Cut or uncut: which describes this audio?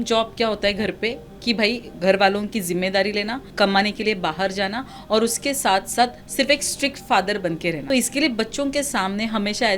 cut